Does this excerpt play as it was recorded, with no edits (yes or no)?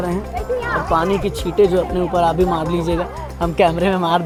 yes